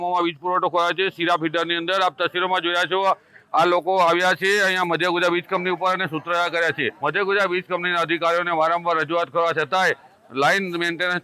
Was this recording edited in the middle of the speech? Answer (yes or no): yes